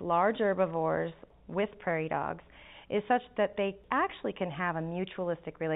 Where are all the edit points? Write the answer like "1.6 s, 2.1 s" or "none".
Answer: 1.3 s, 3.8 s